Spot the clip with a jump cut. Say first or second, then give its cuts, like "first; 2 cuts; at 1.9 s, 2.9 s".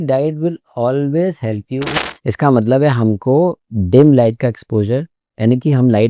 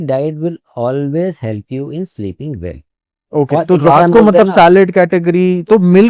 first; 1 cut; at 2.0 s